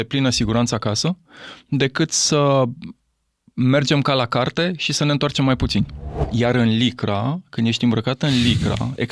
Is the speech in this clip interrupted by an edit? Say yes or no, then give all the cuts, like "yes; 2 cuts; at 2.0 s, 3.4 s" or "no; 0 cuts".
yes; 1 cut; at 6.2 s